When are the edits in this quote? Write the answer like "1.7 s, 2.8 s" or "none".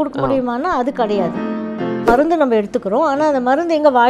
2.0 s